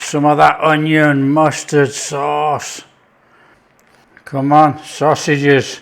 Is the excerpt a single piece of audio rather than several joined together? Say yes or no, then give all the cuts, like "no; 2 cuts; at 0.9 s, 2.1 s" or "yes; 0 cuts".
no; 1 cut; at 4.0 s